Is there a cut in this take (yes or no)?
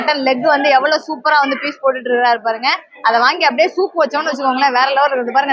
no